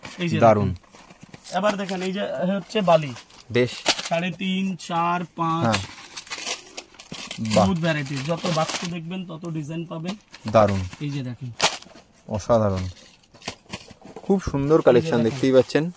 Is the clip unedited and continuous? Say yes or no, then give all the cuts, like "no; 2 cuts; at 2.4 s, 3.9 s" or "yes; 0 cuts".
no; 1 cut; at 1.4 s